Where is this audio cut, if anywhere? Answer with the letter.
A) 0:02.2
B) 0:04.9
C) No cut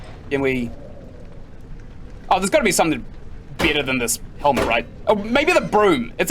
B